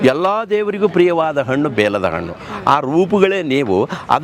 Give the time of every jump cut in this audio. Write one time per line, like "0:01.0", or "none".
none